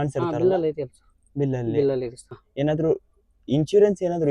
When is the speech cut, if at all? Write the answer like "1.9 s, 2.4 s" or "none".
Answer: 2.4 s